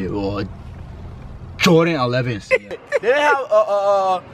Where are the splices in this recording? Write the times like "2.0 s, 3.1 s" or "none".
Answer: 2.8 s